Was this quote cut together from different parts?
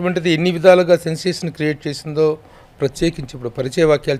no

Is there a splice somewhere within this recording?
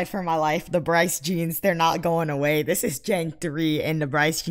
no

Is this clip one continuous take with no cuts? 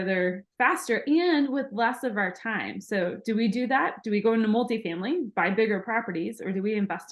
yes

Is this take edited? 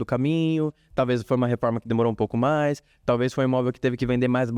no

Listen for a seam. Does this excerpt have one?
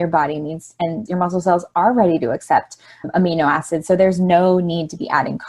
yes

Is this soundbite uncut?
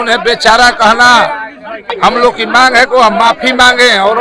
no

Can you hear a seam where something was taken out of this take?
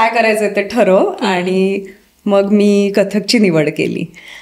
no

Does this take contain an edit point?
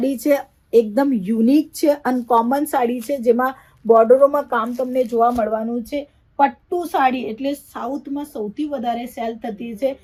no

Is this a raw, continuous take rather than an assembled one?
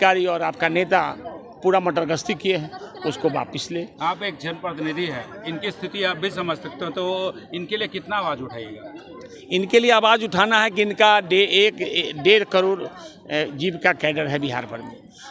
yes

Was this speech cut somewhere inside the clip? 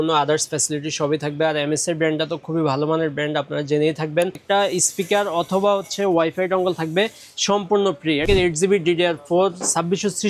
yes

